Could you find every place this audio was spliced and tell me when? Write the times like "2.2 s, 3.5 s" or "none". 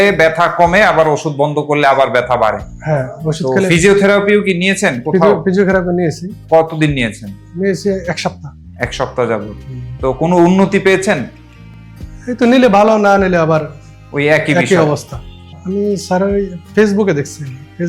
15.6 s